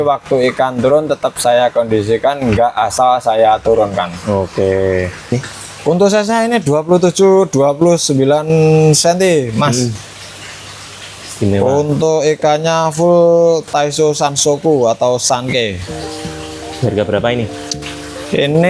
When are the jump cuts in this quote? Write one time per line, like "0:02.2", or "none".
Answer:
0:05.3